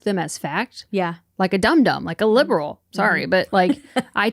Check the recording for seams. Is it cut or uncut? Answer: uncut